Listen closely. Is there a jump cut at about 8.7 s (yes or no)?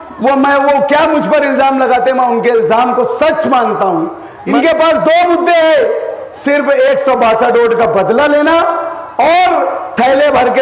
no